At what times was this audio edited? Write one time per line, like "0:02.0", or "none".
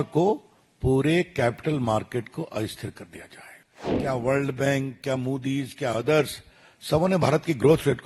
0:04.0